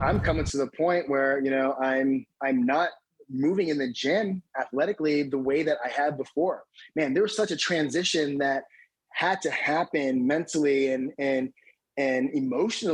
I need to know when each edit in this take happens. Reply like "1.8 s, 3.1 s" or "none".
none